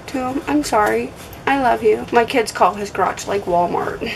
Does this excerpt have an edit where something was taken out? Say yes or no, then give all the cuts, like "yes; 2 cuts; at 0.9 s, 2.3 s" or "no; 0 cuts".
yes; 1 cut; at 2.0 s